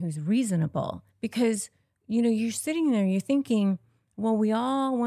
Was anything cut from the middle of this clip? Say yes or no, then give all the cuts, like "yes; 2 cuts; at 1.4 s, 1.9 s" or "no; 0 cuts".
yes; 1 cut; at 1.0 s